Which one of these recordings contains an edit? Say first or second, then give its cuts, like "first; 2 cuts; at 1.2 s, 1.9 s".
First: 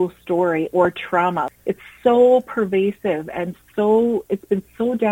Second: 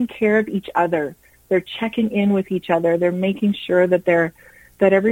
first; 1 cut; at 1.5 s